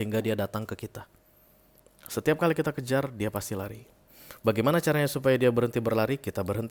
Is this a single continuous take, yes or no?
yes